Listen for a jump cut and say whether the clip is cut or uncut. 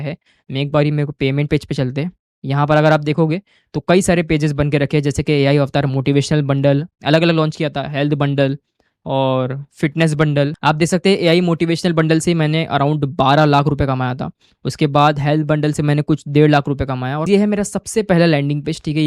cut